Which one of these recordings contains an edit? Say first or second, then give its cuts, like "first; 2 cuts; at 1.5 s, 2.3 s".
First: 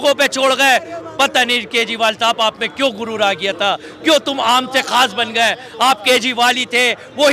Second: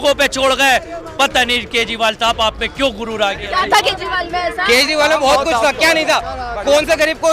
second; 1 cut; at 3.4 s